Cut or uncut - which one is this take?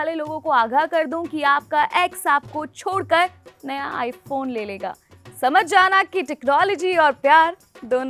uncut